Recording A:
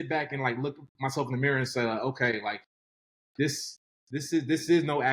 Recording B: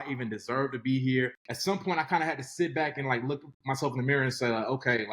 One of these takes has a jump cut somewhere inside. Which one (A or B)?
B